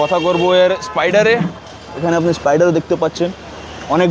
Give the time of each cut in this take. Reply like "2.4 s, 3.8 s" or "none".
none